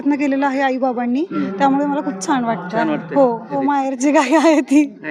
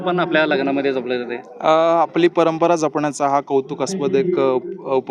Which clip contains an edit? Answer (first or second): first